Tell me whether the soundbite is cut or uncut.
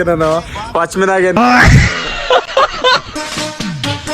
cut